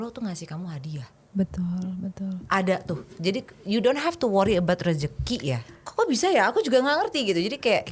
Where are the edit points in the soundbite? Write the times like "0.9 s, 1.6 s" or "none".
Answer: 5.7 s